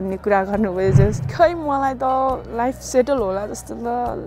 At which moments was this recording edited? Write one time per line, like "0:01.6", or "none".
0:01.2